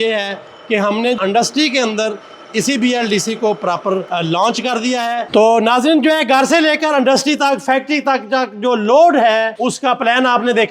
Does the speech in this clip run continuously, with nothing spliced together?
no; 4 cuts; at 1.2 s, 4.1 s, 5.2 s, 9.5 s

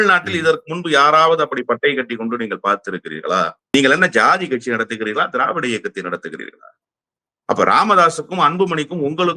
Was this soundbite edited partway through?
yes; 1 cut; at 3.7 s

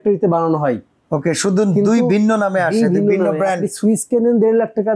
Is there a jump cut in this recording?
no; 0 cuts

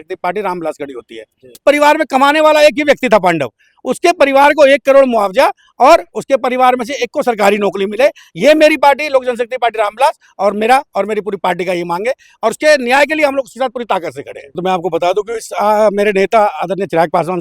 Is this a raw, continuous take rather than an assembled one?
no; 2 cuts; at 1.6 s, 14.6 s

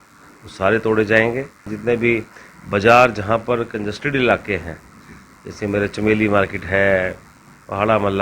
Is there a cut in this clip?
yes; 1 cut; at 1.7 s

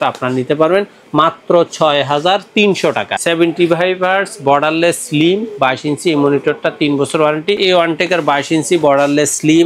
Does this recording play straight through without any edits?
no; 2 cuts; at 3.1 s, 7.6 s

